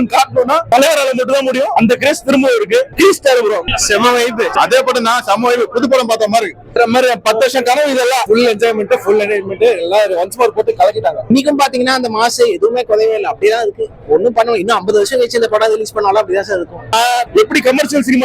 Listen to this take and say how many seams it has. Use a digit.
3